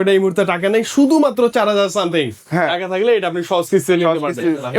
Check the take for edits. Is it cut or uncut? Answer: uncut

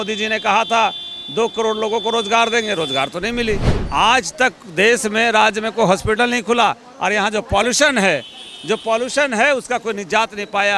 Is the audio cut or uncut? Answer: cut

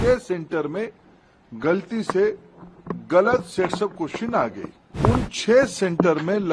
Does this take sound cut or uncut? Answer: cut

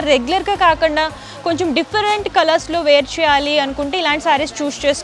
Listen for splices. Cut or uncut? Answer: uncut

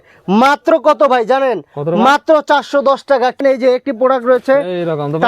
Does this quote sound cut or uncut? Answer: cut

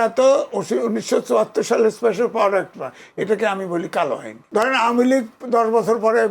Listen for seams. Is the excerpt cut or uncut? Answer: cut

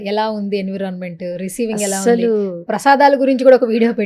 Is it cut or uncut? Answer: uncut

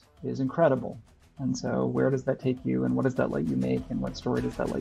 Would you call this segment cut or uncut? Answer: uncut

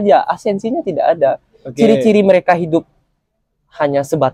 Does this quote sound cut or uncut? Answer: uncut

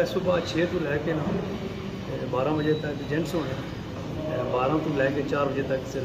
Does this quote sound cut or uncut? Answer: uncut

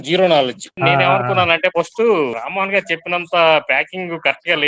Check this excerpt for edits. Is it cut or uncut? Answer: cut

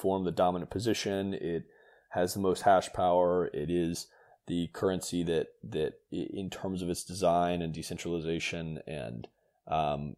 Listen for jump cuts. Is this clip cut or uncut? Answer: uncut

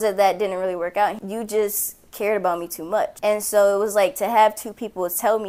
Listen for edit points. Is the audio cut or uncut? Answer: cut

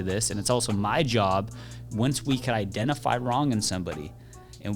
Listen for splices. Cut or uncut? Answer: cut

